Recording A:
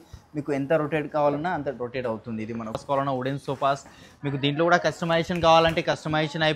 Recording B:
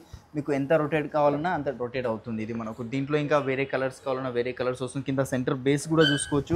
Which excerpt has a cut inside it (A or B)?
A